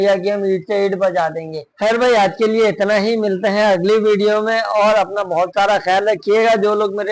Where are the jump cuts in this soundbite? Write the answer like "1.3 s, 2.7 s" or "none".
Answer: none